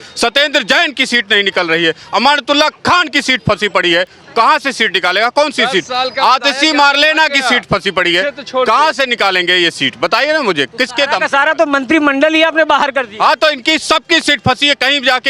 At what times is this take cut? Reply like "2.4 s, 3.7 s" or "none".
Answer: none